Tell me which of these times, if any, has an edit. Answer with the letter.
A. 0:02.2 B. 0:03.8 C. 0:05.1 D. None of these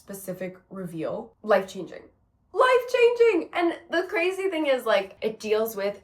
C